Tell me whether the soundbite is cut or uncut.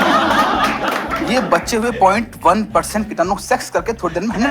cut